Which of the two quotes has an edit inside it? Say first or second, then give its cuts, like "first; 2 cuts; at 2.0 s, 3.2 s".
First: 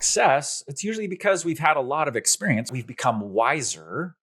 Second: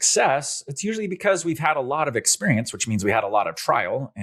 first; 1 cut; at 2.8 s